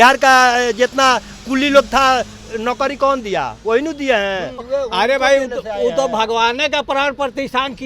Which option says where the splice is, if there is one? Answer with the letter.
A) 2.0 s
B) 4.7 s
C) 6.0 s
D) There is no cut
B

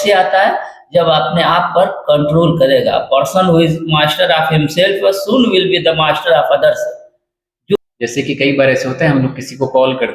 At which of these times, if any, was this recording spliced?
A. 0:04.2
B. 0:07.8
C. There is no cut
B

